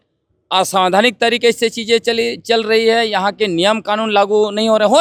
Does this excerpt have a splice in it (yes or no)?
no